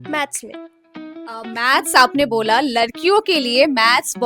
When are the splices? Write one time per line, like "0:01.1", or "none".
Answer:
none